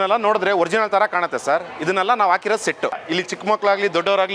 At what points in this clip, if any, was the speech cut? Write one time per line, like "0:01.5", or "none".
0:02.9